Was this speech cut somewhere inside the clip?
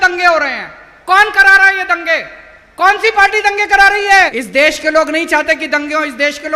yes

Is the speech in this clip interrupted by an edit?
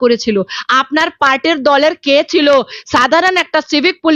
no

